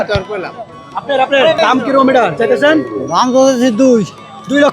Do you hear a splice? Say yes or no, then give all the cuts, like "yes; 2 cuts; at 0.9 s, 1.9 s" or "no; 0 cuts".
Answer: yes; 1 cut; at 1.6 s